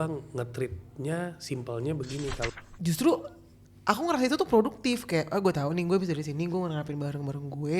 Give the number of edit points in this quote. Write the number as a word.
one